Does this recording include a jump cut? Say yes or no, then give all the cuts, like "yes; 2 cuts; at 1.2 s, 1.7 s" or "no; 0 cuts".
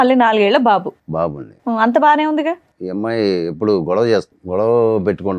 yes; 2 cuts; at 2.7 s, 4.4 s